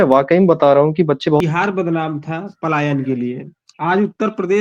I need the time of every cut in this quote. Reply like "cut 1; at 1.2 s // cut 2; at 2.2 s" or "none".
cut 1; at 1.4 s